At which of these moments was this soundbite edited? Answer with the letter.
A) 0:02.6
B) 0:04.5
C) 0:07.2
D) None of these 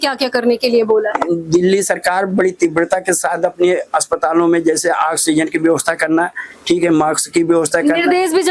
D